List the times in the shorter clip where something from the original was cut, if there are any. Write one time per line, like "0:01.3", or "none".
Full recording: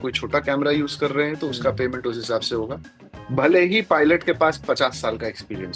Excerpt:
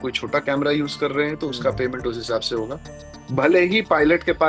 none